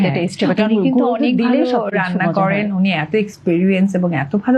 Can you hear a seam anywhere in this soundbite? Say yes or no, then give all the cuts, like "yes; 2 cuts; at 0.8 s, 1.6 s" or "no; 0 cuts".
no; 0 cuts